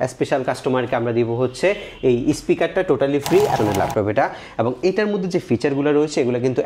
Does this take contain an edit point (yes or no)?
yes